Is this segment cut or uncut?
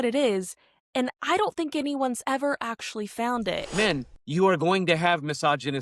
cut